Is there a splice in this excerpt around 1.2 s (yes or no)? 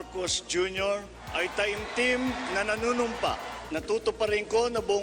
yes